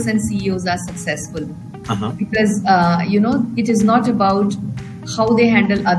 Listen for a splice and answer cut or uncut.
uncut